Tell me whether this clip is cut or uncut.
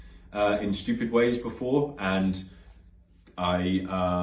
uncut